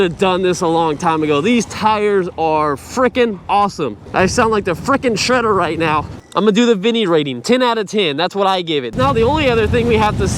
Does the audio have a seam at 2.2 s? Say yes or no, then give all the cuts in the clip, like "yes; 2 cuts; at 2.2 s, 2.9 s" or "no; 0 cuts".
no; 2 cuts; at 6.2 s, 8.9 s